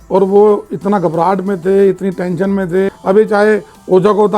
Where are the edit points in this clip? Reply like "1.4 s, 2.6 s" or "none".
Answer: 3.0 s